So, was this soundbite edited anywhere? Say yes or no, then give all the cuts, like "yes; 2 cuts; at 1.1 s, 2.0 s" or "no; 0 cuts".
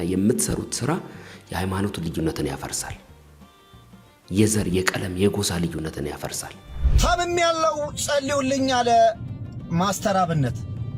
yes; 1 cut; at 6.8 s